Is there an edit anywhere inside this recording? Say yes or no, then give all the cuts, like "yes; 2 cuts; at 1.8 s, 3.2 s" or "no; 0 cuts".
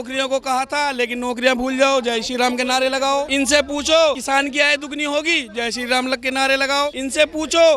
yes; 3 cuts; at 3.3 s, 4.2 s, 7.0 s